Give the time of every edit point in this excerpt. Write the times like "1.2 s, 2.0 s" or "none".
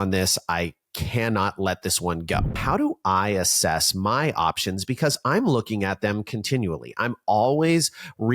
2.6 s